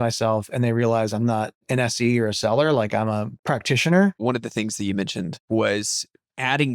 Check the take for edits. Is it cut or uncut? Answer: cut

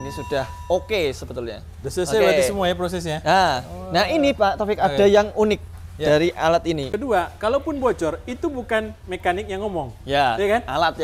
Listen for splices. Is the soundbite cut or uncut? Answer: cut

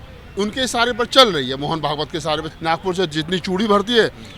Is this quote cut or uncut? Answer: cut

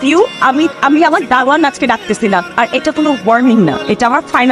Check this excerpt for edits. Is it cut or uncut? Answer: uncut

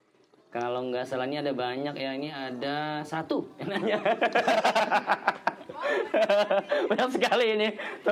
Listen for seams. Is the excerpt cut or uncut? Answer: uncut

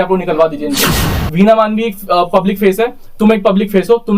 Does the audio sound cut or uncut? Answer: cut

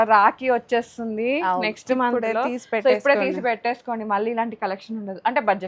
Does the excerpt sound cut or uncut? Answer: uncut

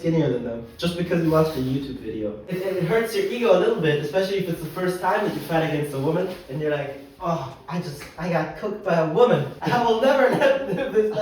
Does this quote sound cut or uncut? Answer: cut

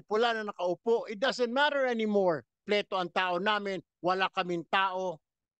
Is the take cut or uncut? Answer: cut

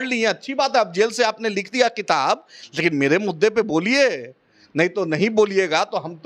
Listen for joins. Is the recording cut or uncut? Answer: uncut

